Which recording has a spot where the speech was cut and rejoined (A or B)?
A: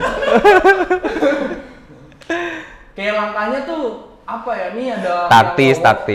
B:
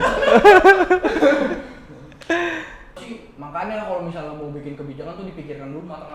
B